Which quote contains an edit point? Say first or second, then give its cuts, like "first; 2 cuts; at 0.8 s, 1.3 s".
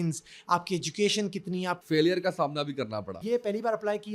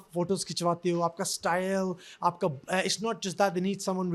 first; 2 cuts; at 1.8 s, 3.2 s